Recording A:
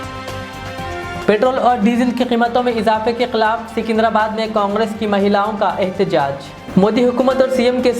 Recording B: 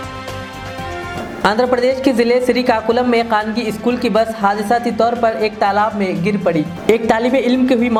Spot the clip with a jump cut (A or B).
A